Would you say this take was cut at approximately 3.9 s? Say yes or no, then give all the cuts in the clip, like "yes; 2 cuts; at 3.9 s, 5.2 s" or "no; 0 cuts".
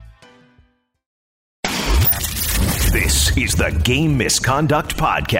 no; 1 cut; at 1.5 s